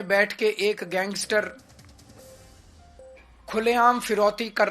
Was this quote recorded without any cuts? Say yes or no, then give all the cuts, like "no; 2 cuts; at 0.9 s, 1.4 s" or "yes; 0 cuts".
yes; 0 cuts